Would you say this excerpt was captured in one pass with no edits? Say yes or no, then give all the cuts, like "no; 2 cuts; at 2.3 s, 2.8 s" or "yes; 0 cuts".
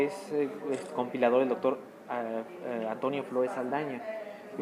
no; 1 cut; at 3.2 s